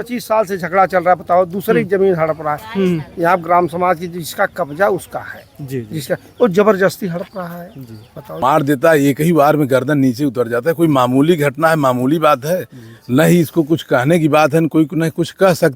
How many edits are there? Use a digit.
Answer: 1